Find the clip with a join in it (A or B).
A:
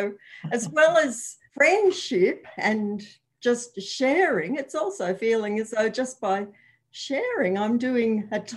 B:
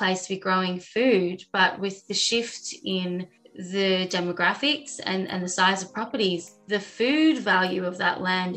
A